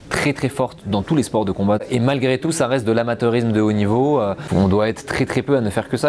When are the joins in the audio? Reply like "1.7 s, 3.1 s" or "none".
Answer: 1.8 s, 4.4 s